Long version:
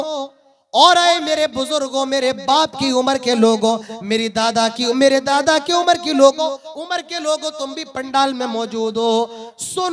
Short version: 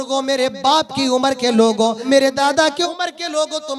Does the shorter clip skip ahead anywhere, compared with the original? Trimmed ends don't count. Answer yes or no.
yes